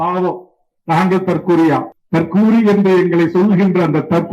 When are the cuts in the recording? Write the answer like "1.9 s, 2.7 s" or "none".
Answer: 2.0 s